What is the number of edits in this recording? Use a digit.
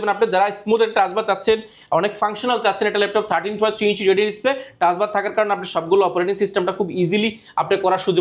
0